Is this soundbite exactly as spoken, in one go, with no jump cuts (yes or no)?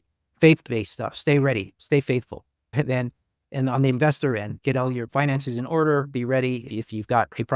yes